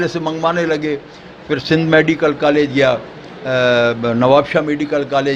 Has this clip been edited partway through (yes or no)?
no